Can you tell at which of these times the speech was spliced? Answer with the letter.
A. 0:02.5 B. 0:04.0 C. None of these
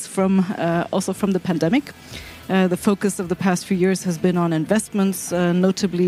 C